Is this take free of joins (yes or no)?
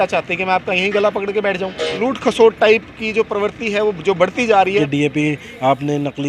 no